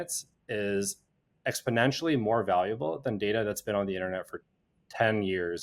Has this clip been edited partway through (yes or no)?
no